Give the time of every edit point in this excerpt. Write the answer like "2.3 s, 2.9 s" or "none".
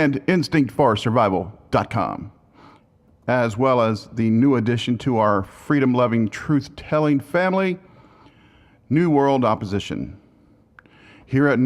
4.0 s